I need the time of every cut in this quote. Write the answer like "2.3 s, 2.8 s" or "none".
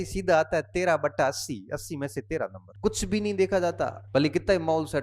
2.6 s, 4.0 s